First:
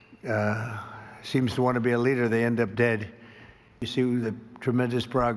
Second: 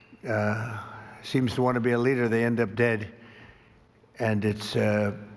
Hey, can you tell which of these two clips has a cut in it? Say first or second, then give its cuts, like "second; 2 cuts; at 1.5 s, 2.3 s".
first; 1 cut; at 3.9 s